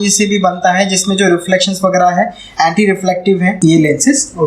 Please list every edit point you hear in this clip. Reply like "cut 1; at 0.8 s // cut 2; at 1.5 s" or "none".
cut 1; at 3.6 s